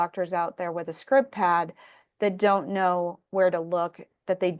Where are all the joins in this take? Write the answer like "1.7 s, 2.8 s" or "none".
none